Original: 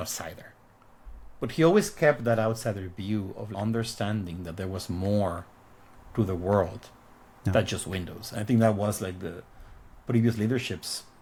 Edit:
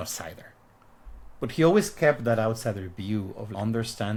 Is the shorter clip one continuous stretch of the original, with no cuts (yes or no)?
yes